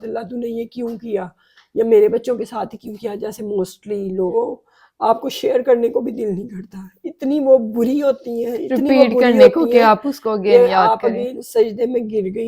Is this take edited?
yes; 2 cuts; at 4.3 s, 11.4 s

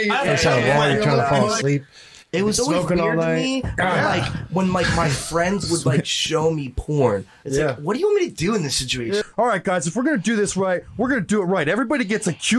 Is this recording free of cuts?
no; 2 cuts; at 1.6 s, 9.2 s

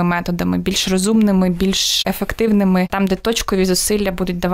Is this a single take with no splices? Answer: no; 2 cuts; at 1.9 s, 2.9 s

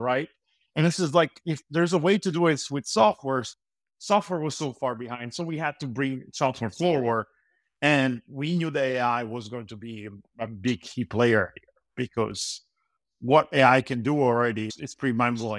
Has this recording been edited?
no; 0 cuts

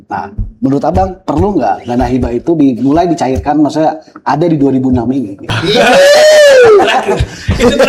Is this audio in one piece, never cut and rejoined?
no; 1 cut; at 5.5 s

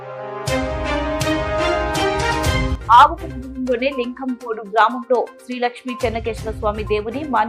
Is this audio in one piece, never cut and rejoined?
yes; 0 cuts

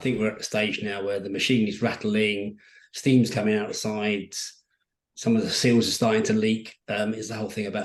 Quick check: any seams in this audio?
no; 0 cuts

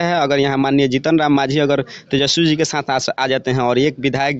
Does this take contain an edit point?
no; 0 cuts

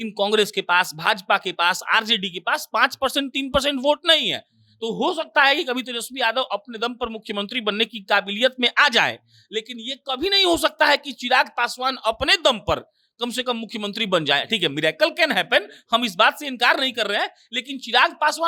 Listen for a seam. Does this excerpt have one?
no; 0 cuts

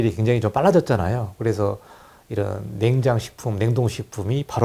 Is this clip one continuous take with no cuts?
yes; 0 cuts

